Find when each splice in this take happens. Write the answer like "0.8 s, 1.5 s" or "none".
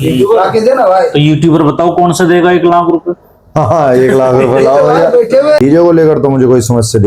5.6 s